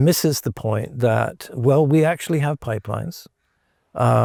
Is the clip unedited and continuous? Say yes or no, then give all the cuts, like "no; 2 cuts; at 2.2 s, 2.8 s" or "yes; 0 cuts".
yes; 0 cuts